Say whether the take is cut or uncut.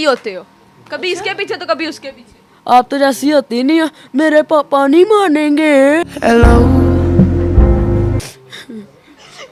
uncut